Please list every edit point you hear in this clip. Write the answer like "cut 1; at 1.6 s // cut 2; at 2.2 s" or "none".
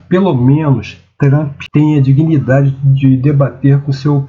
cut 1; at 1.6 s